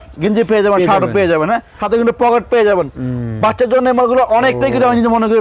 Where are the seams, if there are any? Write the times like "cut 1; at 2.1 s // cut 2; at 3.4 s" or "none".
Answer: cut 1; at 1.7 s

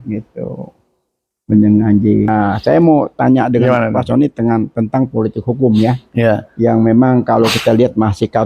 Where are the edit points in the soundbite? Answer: cut 1; at 2.3 s

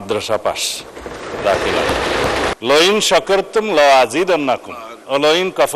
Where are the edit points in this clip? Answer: cut 1; at 2.5 s

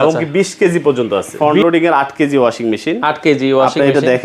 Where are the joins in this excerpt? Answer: cut 1; at 1.3 s

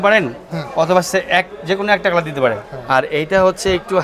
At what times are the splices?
cut 1; at 2.7 s

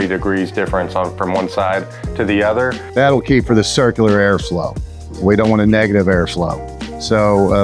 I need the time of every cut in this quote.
cut 1; at 2.8 s

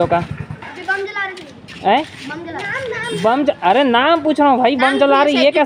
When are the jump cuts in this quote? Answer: none

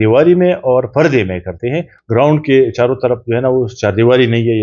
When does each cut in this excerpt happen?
cut 1; at 1.9 s

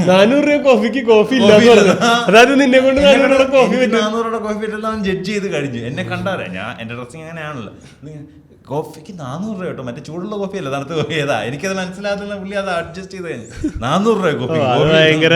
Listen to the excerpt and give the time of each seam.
none

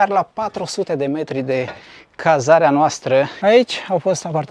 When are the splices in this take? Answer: cut 1; at 3.3 s

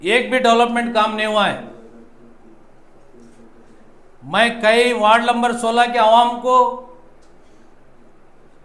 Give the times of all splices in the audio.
none

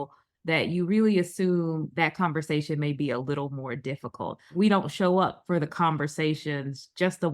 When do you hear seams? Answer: cut 1; at 4.5 s

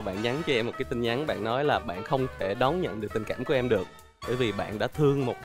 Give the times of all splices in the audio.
none

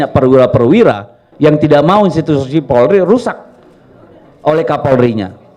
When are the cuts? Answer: none

